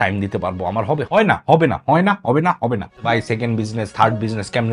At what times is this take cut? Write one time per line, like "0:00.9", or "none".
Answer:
0:01.0
0:03.0